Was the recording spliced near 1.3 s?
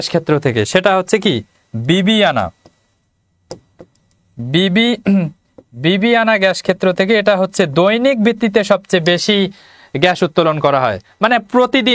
no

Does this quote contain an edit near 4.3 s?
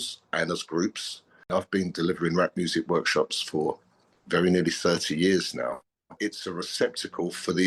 no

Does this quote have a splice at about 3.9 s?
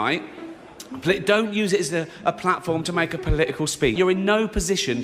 yes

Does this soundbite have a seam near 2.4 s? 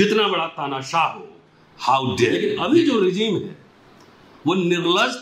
yes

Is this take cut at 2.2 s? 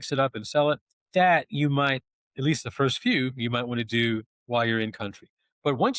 no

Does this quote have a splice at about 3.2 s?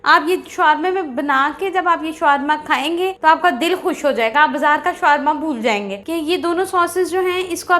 yes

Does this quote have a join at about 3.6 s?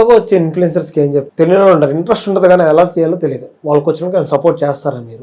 no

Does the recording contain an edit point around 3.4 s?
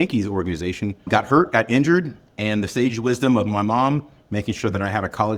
no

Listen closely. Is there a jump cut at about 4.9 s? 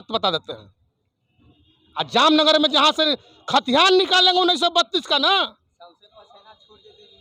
no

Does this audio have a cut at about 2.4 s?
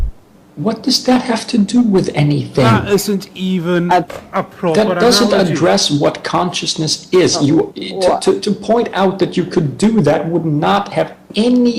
no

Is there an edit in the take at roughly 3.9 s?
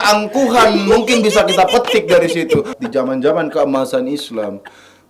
no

